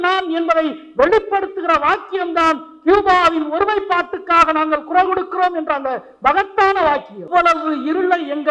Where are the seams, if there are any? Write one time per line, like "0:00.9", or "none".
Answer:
0:07.2

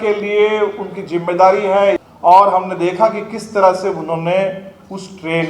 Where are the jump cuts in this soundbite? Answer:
0:02.1

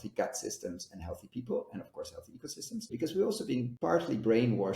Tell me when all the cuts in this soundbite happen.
0:02.9
0:03.7

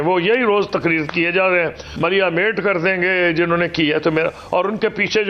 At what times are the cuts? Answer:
0:01.8

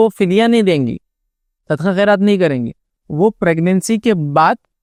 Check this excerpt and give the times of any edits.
none

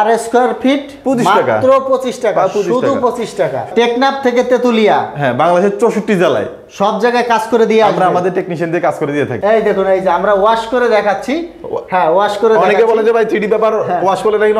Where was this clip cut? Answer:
0:03.7
0:09.3

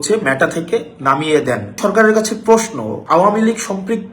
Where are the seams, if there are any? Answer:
0:01.8
0:02.9

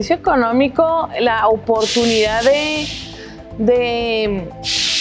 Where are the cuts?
none

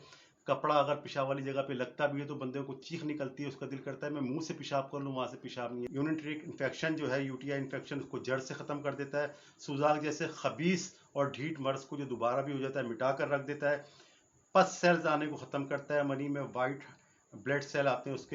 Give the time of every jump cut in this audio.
0:05.9

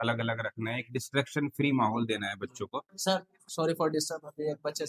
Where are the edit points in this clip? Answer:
0:03.1

